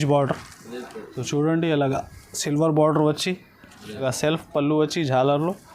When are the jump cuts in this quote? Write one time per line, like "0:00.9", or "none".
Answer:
0:04.0

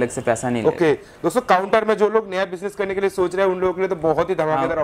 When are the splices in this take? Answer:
none

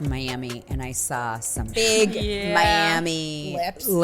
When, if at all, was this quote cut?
0:01.8

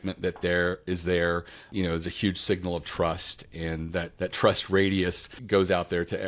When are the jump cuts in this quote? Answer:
0:04.1

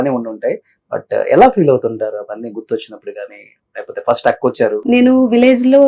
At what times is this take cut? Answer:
0:04.8

